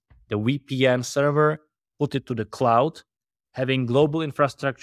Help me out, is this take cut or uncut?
uncut